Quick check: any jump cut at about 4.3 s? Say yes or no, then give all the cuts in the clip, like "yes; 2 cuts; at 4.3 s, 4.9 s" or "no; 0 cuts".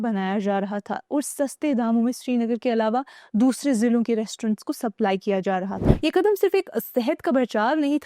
no; 1 cut; at 5.8 s